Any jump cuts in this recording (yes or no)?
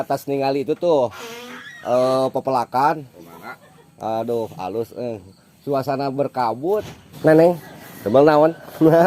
yes